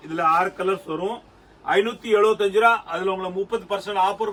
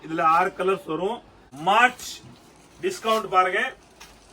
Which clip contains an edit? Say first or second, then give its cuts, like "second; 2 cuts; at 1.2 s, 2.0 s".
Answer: second; 1 cut; at 1.5 s